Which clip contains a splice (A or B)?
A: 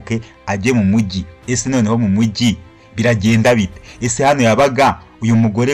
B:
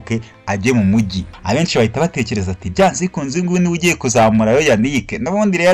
B